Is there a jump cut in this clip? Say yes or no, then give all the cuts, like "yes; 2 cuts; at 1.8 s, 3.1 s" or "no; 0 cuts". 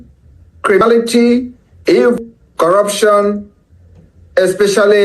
yes; 2 cuts; at 0.8 s, 2.2 s